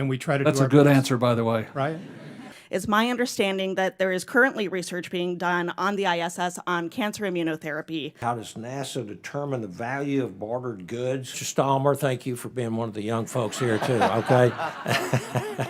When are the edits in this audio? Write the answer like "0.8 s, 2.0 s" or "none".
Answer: 2.4 s, 8.1 s, 11.4 s